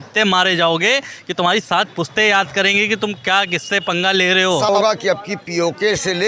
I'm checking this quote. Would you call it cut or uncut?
cut